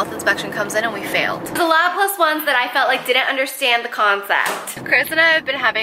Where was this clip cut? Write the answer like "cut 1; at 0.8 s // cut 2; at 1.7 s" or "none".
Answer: cut 1; at 1.6 s // cut 2; at 4.7 s